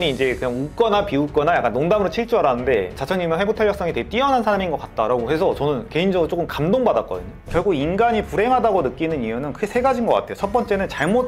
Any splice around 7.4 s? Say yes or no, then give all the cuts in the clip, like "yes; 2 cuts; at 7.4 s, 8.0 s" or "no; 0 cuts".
yes; 1 cut; at 7.4 s